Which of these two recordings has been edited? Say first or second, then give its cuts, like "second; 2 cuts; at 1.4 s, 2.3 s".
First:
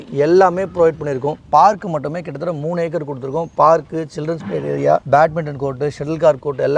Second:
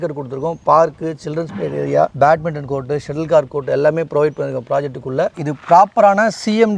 second; 1 cut; at 5.4 s